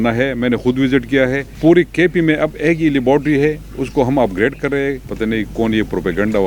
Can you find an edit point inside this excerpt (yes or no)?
yes